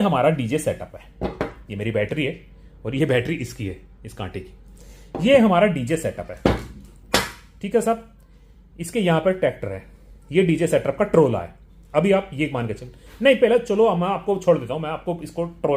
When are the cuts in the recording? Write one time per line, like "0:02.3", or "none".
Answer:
none

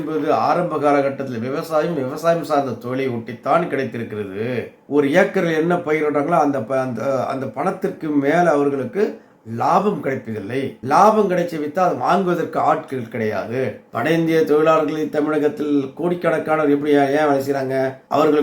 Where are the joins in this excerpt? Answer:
0:04.8
0:13.8

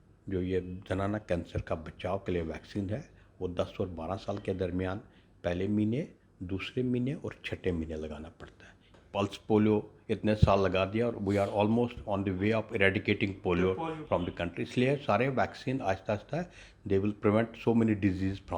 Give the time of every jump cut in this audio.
0:09.0
0:14.0

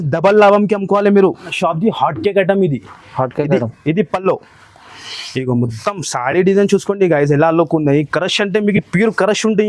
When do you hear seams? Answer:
0:01.5

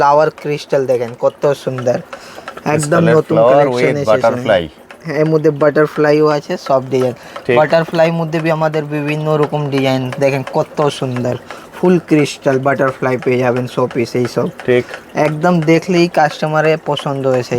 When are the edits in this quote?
none

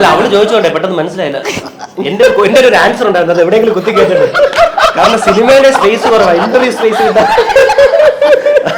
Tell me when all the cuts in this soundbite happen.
none

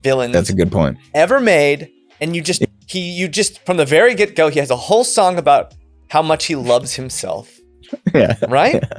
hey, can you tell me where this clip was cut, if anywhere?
none

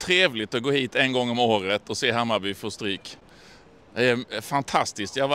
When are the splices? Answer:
none

